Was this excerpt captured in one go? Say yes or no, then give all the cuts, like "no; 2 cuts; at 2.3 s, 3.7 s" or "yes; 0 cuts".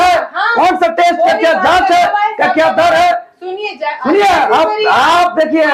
yes; 0 cuts